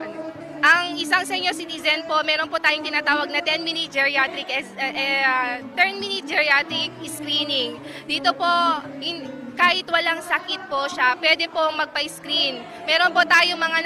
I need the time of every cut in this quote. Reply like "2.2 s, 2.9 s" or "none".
5.5 s, 10.9 s